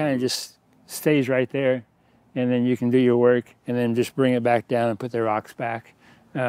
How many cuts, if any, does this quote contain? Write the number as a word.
zero